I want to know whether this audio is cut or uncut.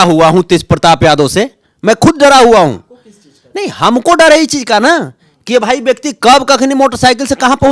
uncut